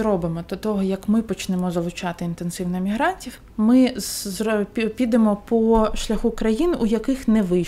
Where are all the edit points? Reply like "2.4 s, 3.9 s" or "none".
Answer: none